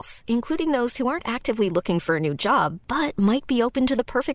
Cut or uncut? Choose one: uncut